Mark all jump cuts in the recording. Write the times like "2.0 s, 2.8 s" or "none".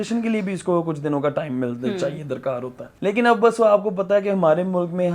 none